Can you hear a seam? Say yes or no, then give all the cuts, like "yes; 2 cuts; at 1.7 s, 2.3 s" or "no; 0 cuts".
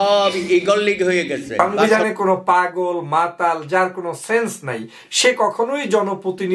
yes; 1 cut; at 1.5 s